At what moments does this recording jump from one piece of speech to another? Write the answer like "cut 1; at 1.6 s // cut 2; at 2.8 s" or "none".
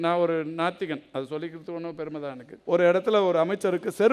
cut 1; at 2.5 s